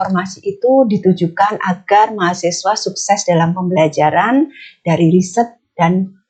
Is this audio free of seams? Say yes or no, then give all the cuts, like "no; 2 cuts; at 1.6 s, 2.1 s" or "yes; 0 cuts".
yes; 0 cuts